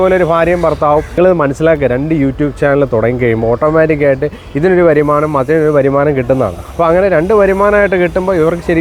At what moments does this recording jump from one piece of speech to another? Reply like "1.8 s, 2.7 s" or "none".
1.1 s